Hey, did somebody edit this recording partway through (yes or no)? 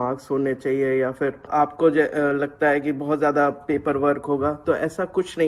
yes